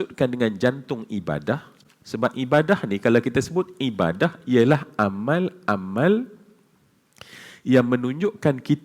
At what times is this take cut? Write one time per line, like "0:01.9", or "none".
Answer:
none